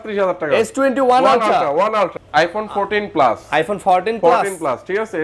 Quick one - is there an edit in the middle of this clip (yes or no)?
yes